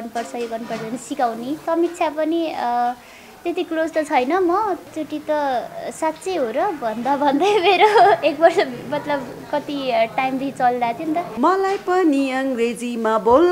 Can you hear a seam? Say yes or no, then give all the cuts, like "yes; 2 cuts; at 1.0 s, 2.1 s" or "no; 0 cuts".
yes; 3 cuts; at 1.6 s, 4.9 s, 11.3 s